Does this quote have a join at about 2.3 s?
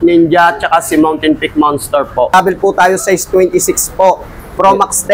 yes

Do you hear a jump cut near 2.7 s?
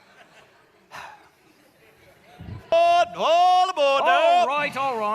yes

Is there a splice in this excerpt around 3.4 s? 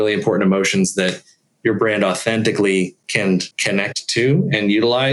yes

